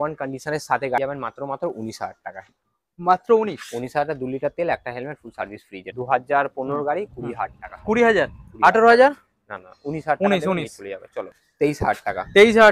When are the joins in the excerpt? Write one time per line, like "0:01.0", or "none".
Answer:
0:01.0
0:05.9
0:11.3